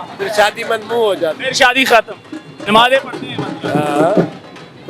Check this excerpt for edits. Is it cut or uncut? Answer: cut